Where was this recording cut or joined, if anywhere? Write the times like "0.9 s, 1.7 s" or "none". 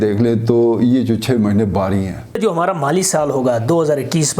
2.4 s